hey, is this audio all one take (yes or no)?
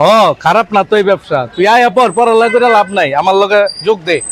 yes